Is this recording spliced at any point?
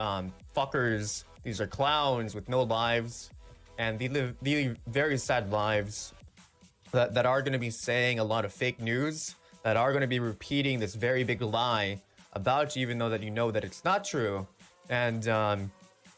yes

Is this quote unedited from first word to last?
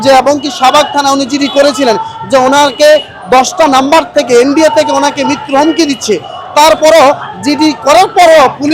yes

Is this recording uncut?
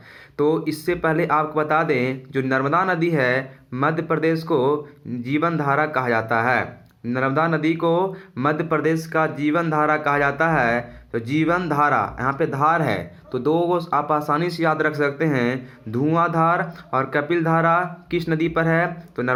yes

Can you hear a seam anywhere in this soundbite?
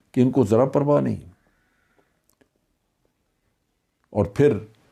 no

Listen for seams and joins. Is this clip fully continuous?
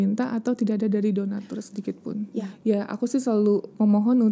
no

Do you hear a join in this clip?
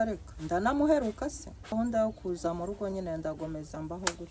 yes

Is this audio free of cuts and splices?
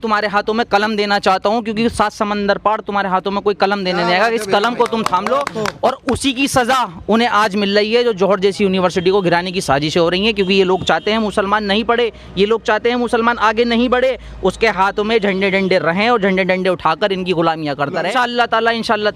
no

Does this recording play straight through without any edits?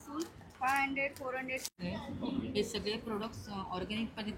no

